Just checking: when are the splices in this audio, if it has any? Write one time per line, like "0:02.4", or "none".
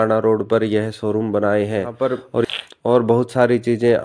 0:02.4

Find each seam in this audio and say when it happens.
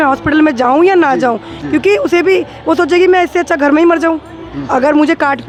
none

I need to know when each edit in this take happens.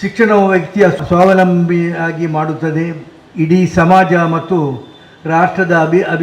0:01.0

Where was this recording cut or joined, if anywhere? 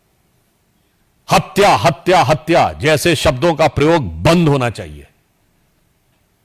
none

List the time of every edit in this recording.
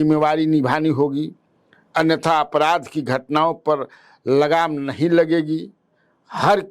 none

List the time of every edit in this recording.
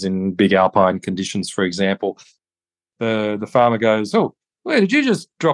0:02.5

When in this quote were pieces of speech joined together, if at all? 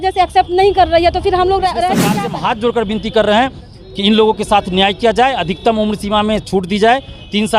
0:02.1

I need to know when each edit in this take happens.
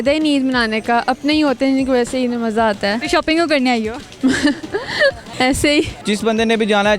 0:03.0
0:05.2
0:06.0

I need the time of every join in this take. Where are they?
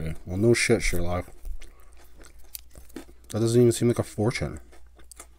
none

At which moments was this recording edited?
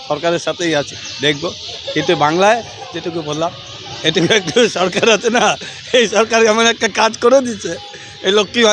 none

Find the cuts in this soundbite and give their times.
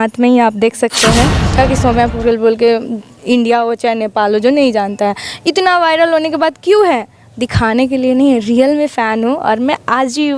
0:01.6

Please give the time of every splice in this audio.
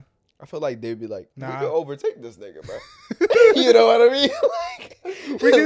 0:01.3

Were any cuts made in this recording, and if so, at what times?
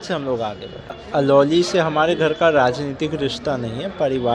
0:00.9

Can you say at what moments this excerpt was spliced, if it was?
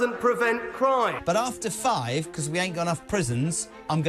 0:01.2

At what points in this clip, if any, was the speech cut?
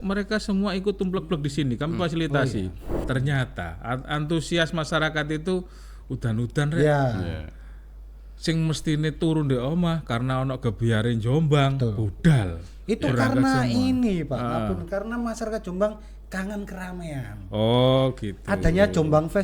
0:03.0

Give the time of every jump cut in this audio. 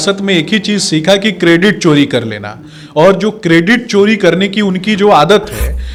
none

